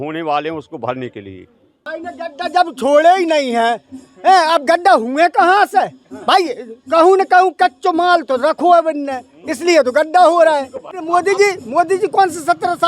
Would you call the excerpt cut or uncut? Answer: cut